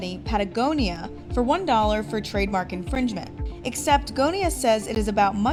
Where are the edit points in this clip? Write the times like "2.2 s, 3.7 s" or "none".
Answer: none